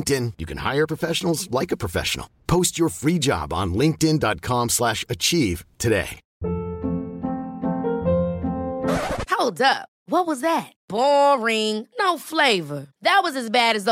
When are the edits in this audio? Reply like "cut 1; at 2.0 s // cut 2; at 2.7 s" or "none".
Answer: cut 1; at 6.3 s

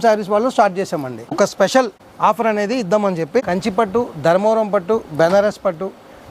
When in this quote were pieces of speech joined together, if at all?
cut 1; at 1.2 s // cut 2; at 2.0 s // cut 3; at 3.4 s

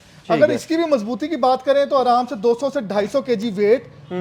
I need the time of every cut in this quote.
none

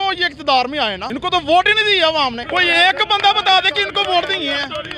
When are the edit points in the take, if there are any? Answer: cut 1; at 1.0 s // cut 2; at 2.4 s

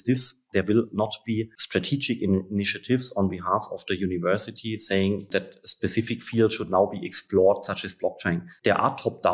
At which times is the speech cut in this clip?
cut 1; at 1.6 s

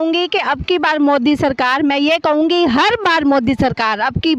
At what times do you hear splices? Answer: none

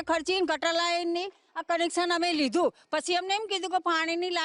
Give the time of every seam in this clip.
none

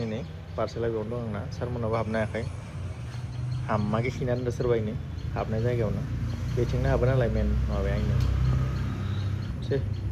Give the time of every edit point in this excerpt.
none

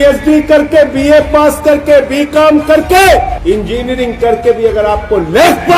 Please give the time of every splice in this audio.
cut 1; at 3.3 s

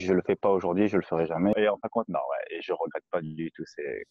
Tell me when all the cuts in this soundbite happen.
cut 1; at 1.5 s

